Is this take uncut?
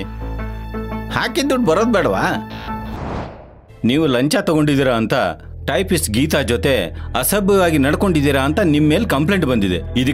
no; 1 cut; at 3.4 s

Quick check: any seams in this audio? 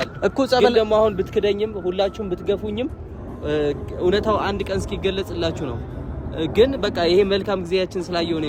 no; 0 cuts

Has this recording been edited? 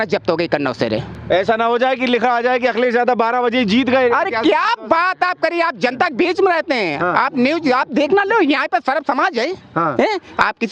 no; 0 cuts

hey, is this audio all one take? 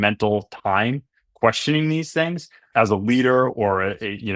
no; 1 cut; at 2.7 s

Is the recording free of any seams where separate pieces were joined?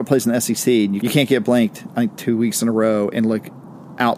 no; 1 cut; at 1.0 s

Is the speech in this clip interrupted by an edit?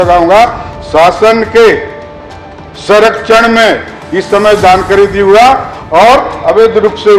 no; 0 cuts

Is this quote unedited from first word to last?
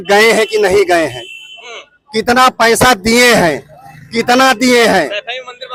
yes; 0 cuts

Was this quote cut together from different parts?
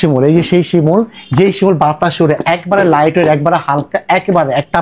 no; 0 cuts

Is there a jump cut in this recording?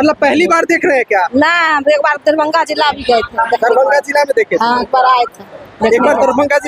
no; 0 cuts

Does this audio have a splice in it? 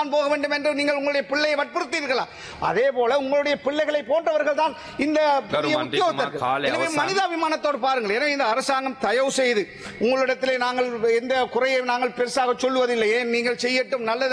no; 0 cuts

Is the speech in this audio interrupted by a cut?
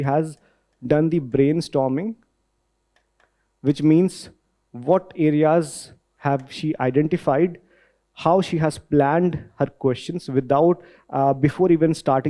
no; 0 cuts

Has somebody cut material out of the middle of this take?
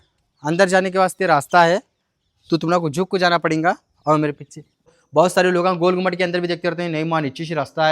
yes; 1 cut; at 5.0 s

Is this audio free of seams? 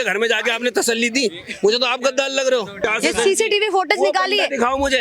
no; 1 cut; at 2.8 s

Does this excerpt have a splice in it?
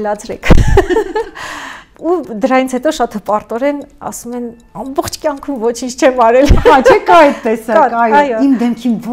yes; 1 cut; at 1.8 s

